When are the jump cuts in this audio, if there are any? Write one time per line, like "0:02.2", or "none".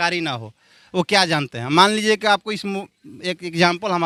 none